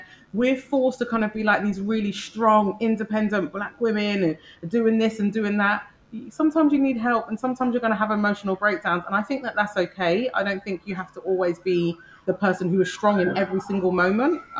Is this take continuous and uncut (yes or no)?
no